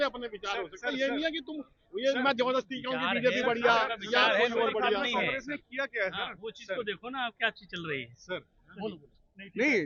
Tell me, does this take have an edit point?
no; 0 cuts

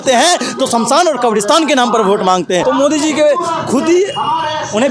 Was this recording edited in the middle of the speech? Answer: yes; 1 cut; at 2.6 s

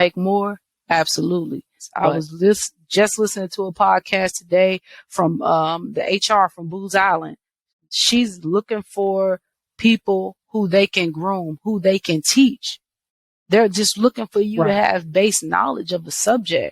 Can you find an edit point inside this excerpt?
yes; 1 cut; at 1.8 s

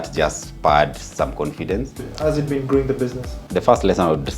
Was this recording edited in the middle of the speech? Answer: yes; 2 cuts; at 2.1 s, 3.3 s

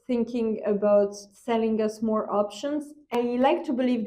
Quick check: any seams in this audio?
yes; 1 cut; at 3.1 s

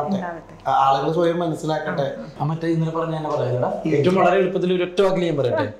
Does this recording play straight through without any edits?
no; 1 cut; at 2.3 s

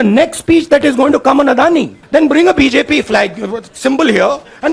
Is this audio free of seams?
no; 1 cut; at 2.0 s

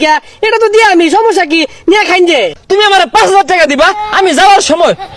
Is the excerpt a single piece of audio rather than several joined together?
no; 1 cut; at 2.6 s

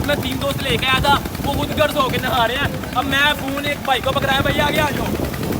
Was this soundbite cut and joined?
no; 0 cuts

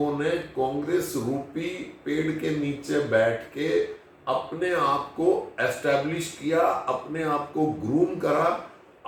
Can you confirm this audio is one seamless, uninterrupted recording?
yes; 0 cuts

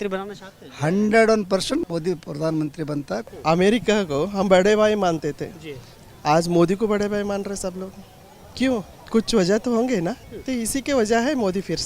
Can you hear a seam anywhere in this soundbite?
yes; 4 cuts; at 1.8 s, 3.3 s, 9.0 s, 10.3 s

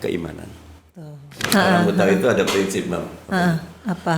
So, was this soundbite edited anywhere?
yes; 1 cut; at 1.4 s

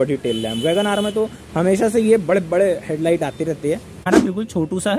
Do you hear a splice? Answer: yes; 1 cut; at 4.1 s

